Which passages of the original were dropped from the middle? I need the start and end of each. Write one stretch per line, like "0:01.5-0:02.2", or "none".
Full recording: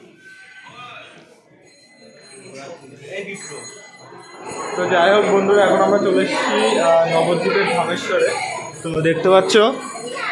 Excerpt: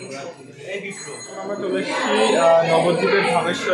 0:04.1-0:06.1